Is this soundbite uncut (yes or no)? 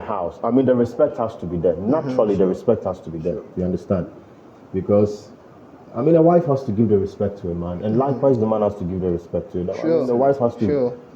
yes